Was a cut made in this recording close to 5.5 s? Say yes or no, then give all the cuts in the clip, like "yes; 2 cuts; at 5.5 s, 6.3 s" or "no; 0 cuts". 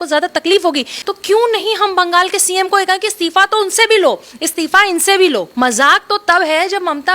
yes; 2 cuts; at 0.9 s, 5.5 s